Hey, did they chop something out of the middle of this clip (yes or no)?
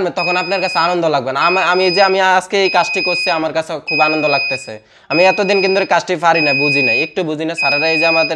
no